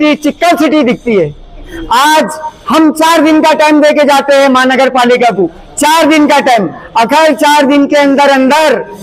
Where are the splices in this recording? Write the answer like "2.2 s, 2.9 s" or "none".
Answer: 1.8 s